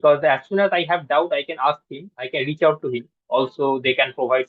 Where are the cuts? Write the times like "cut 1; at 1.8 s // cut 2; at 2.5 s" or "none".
cut 1; at 3.1 s